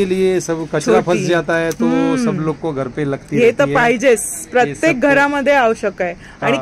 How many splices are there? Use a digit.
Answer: 0